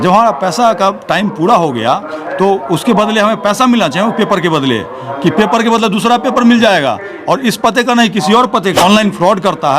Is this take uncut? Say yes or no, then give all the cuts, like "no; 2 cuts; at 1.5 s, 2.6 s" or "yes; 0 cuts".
no; 1 cut; at 8.8 s